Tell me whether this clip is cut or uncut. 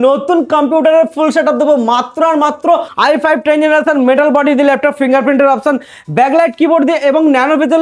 cut